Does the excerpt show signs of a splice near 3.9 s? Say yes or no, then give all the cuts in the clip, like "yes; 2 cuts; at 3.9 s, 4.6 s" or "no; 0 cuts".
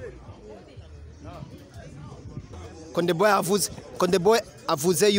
no; 1 cut; at 2.5 s